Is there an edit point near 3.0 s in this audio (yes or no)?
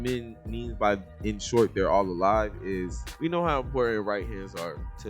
yes